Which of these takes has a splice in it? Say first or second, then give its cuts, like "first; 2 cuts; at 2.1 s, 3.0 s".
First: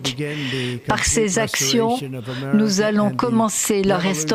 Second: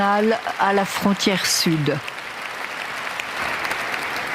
second; 1 cut; at 3.4 s